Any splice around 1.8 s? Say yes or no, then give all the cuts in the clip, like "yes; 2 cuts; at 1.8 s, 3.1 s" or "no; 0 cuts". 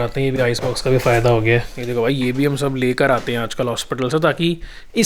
yes; 1 cut; at 1.8 s